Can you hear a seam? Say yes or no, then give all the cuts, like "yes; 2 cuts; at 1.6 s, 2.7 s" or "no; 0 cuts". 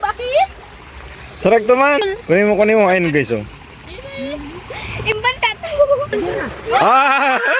yes; 1 cut; at 6.1 s